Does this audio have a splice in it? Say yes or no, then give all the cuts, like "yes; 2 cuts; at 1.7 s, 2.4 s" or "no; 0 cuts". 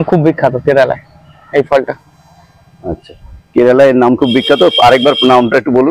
no; 0 cuts